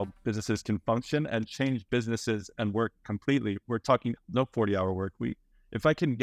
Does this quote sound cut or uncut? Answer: cut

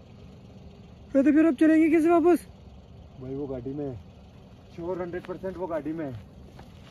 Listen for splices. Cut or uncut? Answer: uncut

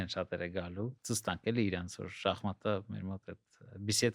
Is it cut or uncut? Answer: cut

